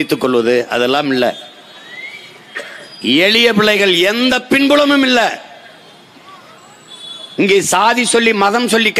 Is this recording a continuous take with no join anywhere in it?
yes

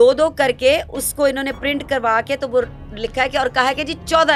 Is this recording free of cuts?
yes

